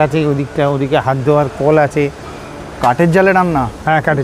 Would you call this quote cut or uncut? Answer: cut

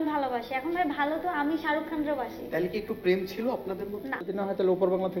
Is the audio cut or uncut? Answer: cut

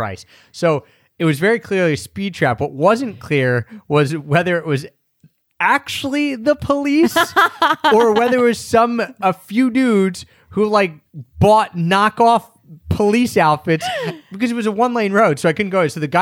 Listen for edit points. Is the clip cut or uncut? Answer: uncut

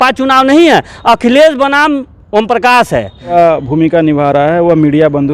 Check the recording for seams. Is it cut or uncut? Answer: cut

